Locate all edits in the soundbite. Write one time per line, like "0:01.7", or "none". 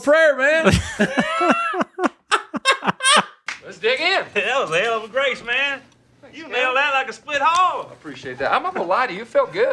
none